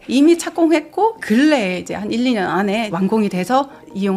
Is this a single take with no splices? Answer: no; 1 cut; at 2.9 s

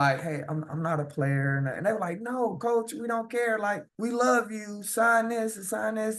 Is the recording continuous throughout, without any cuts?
no; 1 cut; at 3.9 s

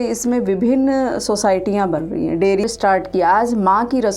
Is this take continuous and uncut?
no; 1 cut; at 2.7 s

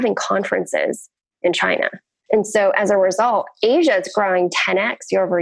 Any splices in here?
yes; 1 cut; at 2.1 s

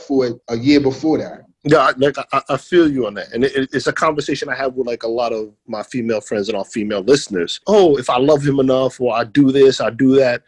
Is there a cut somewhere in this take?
no; 0 cuts

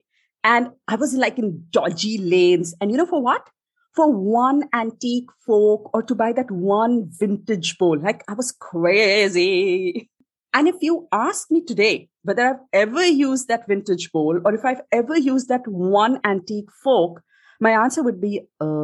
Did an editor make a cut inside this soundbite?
yes; 1 cut; at 10.1 s

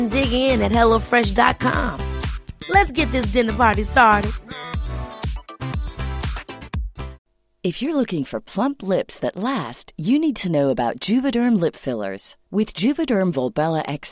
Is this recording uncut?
yes; 0 cuts

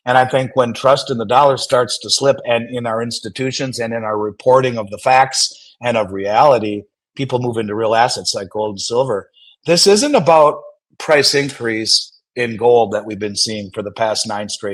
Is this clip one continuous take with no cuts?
yes; 0 cuts

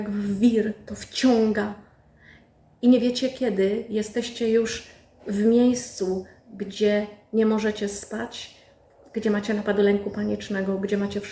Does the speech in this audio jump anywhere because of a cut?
no; 0 cuts

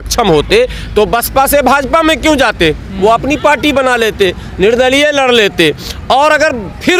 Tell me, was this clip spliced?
no; 0 cuts

